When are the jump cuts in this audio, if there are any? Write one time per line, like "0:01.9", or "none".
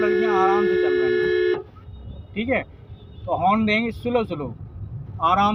none